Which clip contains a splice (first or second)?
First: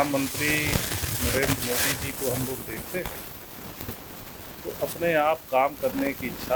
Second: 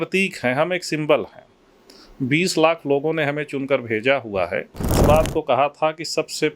second